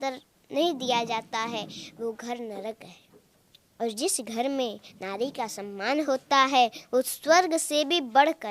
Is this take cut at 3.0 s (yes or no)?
no